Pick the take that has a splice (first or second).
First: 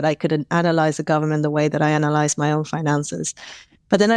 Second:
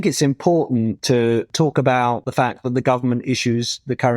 second